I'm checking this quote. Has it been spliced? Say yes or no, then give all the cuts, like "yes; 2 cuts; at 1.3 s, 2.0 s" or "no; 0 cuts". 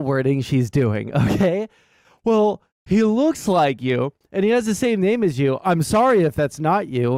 no; 0 cuts